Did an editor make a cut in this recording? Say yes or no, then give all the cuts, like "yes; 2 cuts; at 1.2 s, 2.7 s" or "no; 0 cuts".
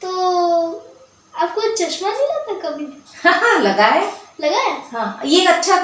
no; 0 cuts